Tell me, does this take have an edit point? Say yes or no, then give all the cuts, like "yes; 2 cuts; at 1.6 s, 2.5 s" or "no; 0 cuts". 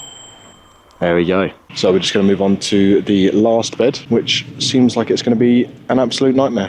yes; 2 cuts; at 1.6 s, 4.0 s